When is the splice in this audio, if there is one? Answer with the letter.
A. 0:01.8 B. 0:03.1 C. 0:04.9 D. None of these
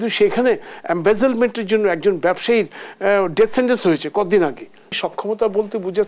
C